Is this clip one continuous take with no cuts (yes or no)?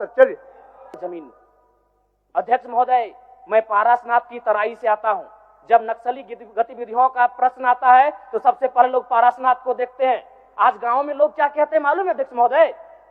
no